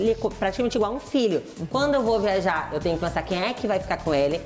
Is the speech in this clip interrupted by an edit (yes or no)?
no